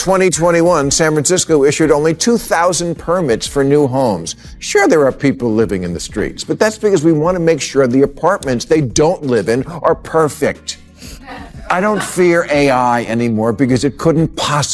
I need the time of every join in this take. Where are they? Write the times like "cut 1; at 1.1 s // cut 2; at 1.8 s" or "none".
none